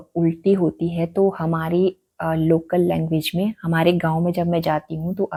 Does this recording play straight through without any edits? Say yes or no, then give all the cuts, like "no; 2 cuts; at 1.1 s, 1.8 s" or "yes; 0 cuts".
yes; 0 cuts